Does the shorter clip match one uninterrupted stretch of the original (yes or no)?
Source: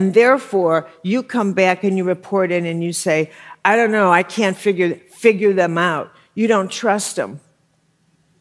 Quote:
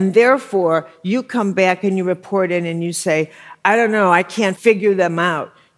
no